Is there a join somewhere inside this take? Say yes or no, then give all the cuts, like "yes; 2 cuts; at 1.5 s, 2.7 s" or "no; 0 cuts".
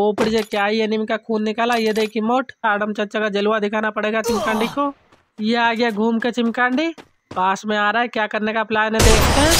yes; 1 cut; at 2.6 s